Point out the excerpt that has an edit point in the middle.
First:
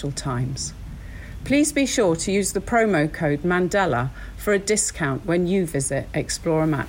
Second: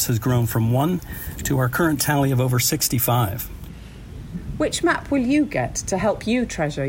second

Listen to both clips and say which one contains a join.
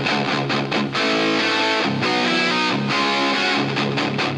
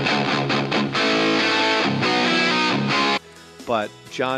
first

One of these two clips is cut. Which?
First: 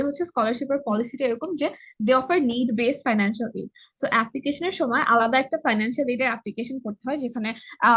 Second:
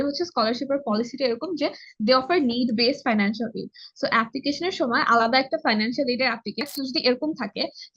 second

